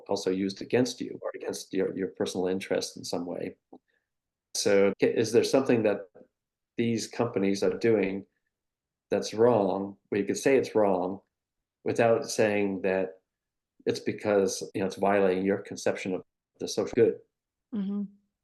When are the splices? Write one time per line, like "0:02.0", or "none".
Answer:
0:01.2
0:04.7
0:13.7
0:14.6